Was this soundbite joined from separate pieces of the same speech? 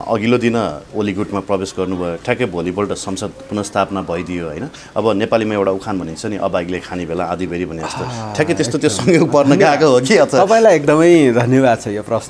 no; 0 cuts

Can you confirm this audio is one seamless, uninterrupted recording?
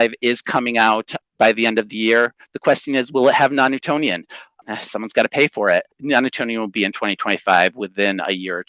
no; 3 cuts; at 1.1 s, 4.5 s, 5.9 s

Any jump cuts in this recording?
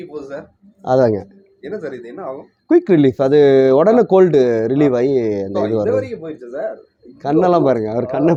no; 0 cuts

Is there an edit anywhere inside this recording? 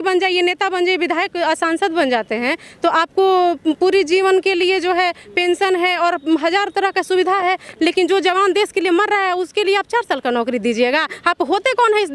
no; 0 cuts

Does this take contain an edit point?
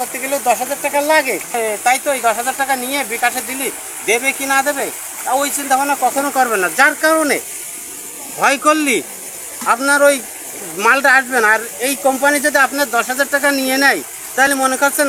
yes; 1 cut; at 1.5 s

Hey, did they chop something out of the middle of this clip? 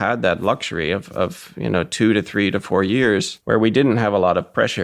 yes; 1 cut; at 3.3 s

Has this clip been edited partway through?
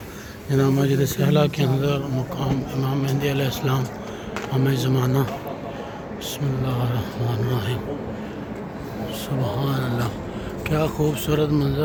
no; 0 cuts

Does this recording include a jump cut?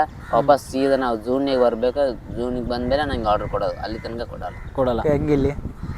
yes; 1 cut; at 5.0 s

